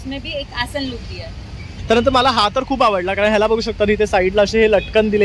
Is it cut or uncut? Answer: cut